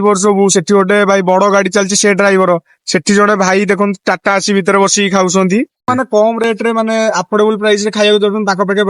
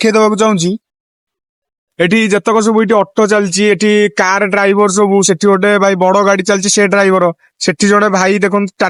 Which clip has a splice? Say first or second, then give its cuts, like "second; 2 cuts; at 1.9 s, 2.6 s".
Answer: first; 1 cut; at 5.8 s